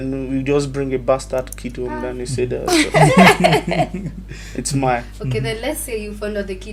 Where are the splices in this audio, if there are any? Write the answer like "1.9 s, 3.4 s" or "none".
none